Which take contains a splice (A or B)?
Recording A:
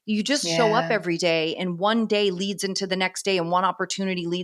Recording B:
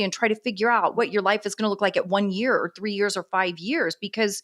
B